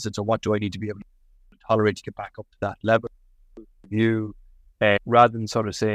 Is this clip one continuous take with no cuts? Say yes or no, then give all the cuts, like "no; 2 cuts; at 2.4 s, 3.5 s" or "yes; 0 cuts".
no; 1 cut; at 5.0 s